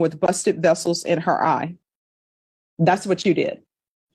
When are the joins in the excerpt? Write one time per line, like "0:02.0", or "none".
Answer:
none

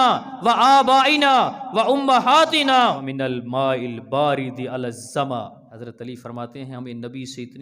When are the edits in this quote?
0:03.0
0:05.6

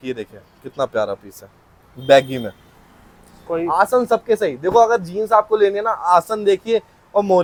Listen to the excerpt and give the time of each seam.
none

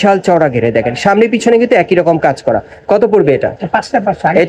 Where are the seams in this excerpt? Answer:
none

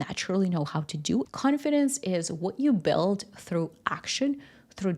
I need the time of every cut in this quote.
0:01.3

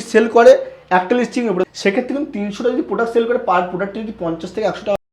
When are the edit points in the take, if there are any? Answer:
0:01.6

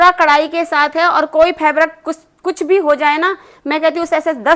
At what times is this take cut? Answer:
none

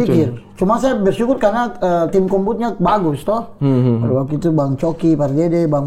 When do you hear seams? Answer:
none

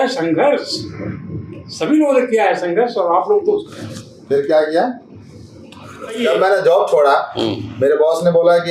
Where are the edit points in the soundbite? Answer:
0:06.2

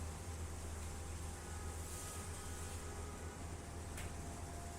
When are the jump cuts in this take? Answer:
0:03.4

